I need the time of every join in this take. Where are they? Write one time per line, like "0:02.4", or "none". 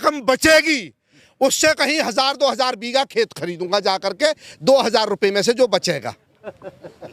none